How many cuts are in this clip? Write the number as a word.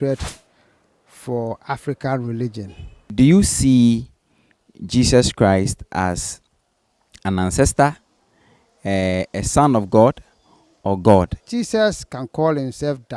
two